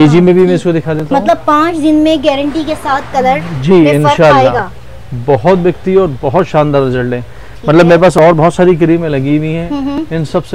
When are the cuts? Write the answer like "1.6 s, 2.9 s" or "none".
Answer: none